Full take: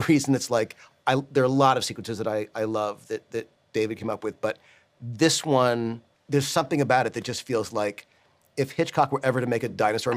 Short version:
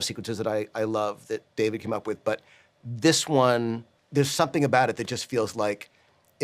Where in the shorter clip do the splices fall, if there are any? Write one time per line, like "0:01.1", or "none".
0:01.4